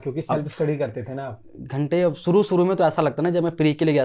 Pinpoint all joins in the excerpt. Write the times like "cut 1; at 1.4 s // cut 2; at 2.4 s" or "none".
none

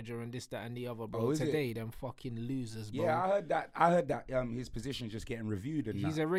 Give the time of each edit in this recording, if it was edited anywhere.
none

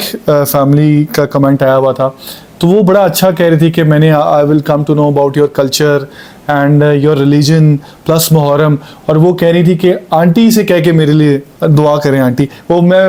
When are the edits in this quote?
none

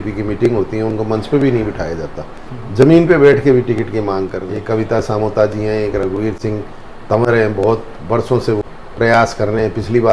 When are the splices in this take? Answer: cut 1; at 4.5 s // cut 2; at 8.6 s

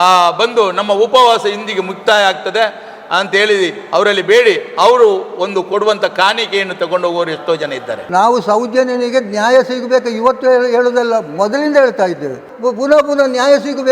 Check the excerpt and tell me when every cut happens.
cut 1; at 7.9 s // cut 2; at 12.5 s

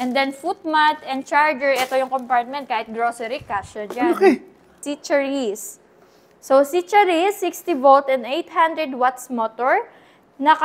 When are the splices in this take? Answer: cut 1; at 4.9 s

